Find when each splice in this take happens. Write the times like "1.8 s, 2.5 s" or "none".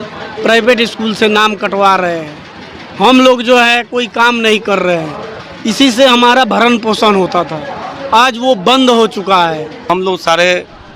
9.9 s

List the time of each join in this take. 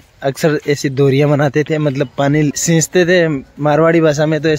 2.6 s

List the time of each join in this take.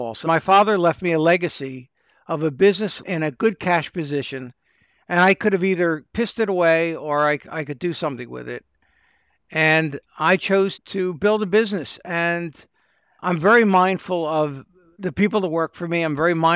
none

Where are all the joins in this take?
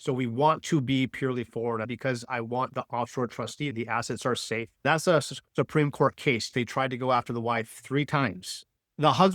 1.9 s, 3.7 s, 4.8 s, 6.5 s

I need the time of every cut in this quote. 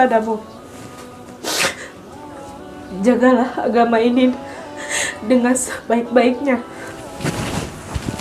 none

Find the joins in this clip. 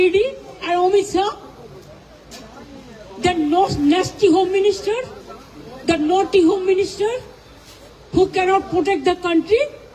none

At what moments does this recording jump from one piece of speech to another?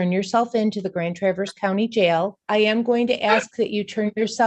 2.4 s

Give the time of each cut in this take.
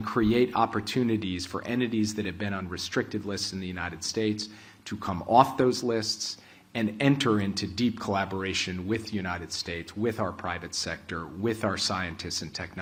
none

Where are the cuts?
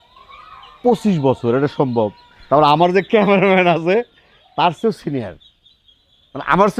none

